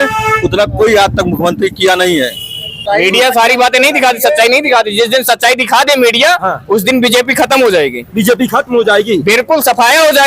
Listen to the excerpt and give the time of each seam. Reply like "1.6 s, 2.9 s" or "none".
2.8 s